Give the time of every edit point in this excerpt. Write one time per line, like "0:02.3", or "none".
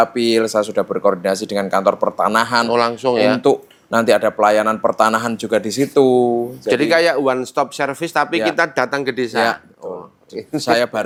none